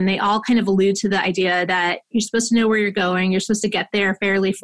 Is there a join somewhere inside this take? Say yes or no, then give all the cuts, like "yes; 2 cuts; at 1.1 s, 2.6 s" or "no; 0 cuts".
no; 0 cuts